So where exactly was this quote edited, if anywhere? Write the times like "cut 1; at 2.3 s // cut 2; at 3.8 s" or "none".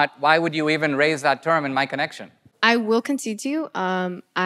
cut 1; at 2.5 s